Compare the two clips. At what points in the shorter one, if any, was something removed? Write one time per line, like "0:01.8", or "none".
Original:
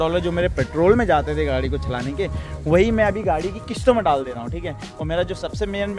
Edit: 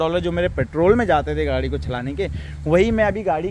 none